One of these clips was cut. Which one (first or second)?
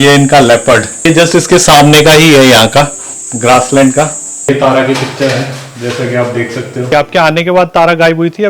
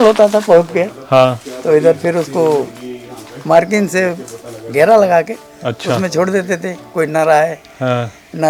first